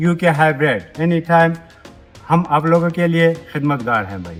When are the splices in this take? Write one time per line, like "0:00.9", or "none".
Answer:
none